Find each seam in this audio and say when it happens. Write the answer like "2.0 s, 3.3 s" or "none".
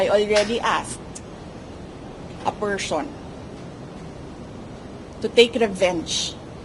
none